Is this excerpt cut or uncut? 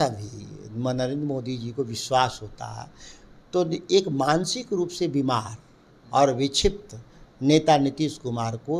uncut